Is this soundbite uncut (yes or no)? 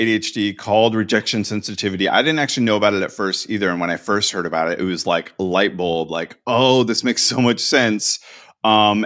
yes